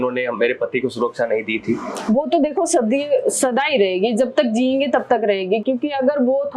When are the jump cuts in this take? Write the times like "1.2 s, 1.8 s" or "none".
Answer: none